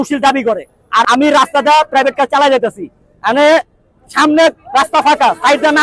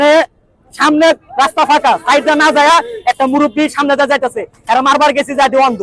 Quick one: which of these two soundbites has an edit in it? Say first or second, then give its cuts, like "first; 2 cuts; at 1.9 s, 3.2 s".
first; 1 cut; at 1.0 s